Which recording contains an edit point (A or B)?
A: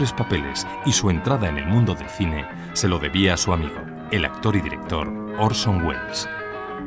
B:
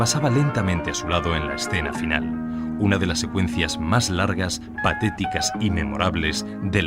B